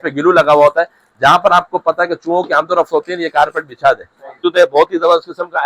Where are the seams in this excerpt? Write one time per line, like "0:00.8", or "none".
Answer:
0:04.4